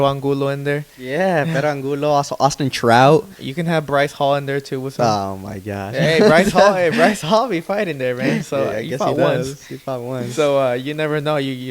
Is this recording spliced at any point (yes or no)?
no